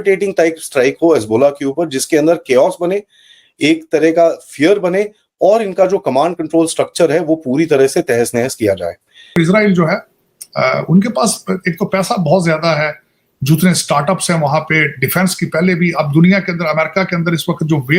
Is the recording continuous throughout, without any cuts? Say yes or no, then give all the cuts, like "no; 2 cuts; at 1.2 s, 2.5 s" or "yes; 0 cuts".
no; 1 cut; at 9.4 s